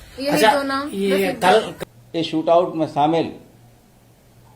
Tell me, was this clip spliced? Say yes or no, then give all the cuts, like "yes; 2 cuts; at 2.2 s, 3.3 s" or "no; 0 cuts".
yes; 1 cut; at 1.7 s